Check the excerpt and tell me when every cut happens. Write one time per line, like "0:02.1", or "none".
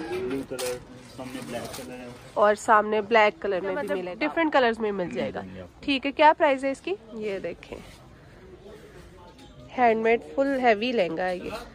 0:04.0
0:07.1